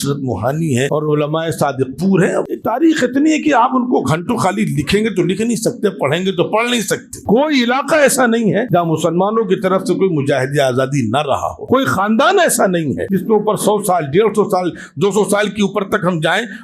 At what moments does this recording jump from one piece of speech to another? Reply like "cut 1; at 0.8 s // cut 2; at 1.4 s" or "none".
cut 1; at 0.9 s // cut 2; at 2.6 s // cut 3; at 7.1 s // cut 4; at 8.7 s // cut 5; at 11.5 s // cut 6; at 13.0 s